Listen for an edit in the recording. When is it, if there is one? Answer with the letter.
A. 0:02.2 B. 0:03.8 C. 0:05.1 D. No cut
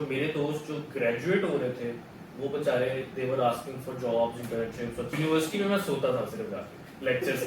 C